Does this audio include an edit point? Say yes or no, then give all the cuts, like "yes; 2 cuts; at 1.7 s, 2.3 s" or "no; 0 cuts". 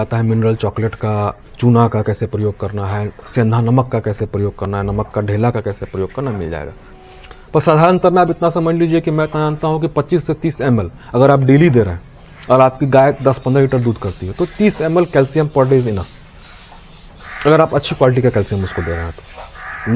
no; 0 cuts